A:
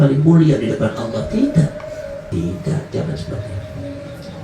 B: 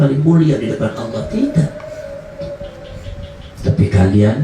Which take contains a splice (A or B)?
A